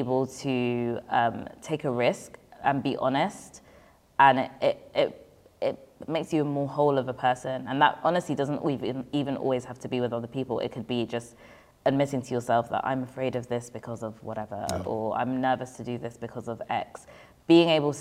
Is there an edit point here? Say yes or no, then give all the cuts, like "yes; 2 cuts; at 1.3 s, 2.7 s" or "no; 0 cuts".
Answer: no; 0 cuts